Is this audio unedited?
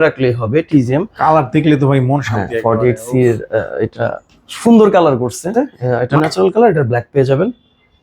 no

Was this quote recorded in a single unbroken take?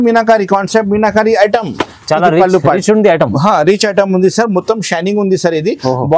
yes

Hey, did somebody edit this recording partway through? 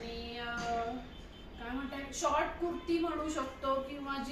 no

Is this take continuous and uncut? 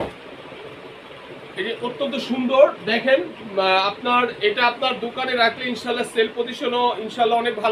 yes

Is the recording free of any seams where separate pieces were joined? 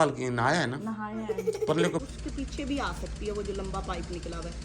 no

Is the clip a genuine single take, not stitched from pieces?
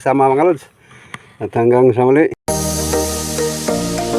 no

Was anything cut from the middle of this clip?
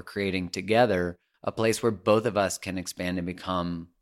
no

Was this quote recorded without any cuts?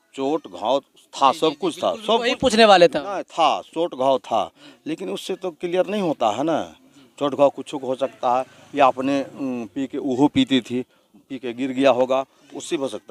yes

